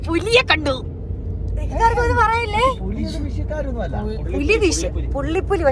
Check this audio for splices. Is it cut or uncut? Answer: uncut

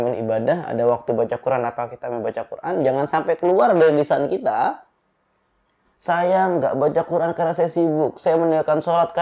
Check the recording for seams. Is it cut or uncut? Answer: uncut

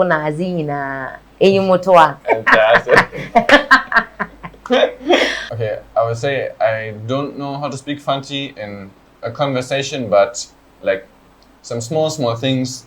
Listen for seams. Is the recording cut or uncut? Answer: cut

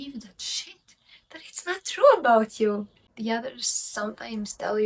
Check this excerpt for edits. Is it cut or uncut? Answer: cut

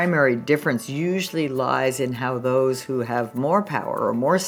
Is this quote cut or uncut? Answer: uncut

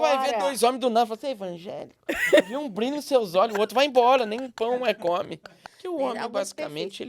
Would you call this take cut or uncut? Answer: cut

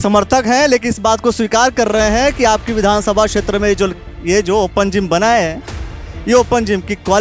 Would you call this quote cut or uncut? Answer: uncut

